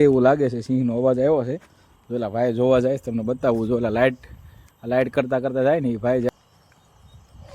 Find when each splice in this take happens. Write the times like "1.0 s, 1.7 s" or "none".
6.3 s